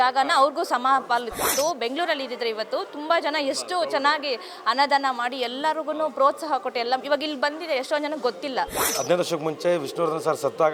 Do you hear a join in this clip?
yes; 2 cuts; at 1.5 s, 8.9 s

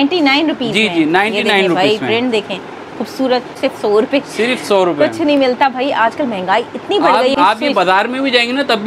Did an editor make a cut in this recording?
yes; 2 cuts; at 3.6 s, 7.3 s

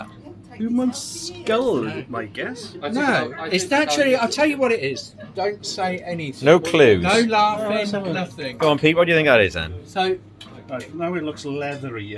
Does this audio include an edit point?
no; 0 cuts

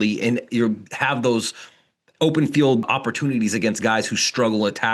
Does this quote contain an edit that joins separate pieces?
no; 0 cuts

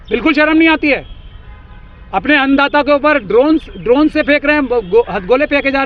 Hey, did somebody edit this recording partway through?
no; 0 cuts

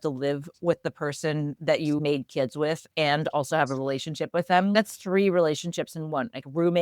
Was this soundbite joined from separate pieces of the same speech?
yes; 1 cut; at 2.0 s

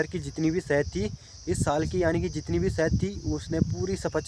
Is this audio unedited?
yes; 0 cuts

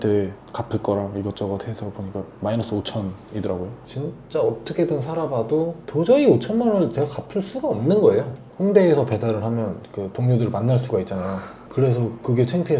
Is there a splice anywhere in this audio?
yes; 2 cuts; at 3.8 s, 8.4 s

